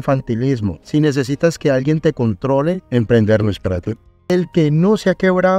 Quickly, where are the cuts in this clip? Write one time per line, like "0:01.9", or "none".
0:04.1